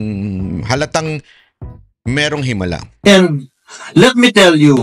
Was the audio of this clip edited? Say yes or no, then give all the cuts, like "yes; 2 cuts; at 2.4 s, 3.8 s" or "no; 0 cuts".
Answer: yes; 1 cut; at 3.0 s